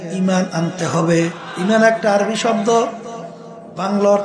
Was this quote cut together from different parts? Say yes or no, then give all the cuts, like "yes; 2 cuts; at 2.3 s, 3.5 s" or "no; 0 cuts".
yes; 1 cut; at 1.4 s